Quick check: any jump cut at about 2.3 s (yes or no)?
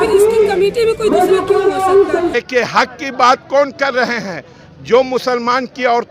yes